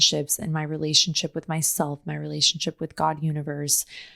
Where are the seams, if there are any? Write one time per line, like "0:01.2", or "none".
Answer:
none